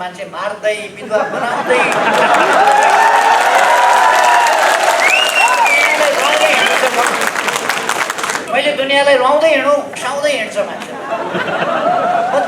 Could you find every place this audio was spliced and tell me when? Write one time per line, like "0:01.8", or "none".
0:08.4
0:09.9